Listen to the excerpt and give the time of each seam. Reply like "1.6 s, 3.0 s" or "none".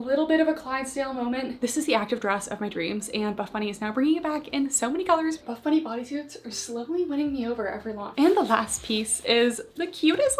1.6 s, 5.4 s, 8.1 s